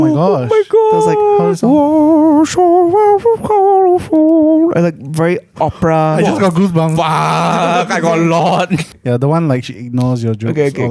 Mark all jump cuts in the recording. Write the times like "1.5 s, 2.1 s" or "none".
8.9 s